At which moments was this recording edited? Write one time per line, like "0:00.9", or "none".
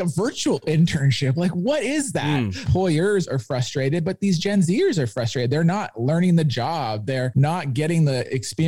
0:02.6
0:07.3